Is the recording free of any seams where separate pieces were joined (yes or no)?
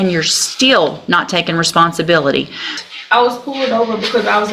no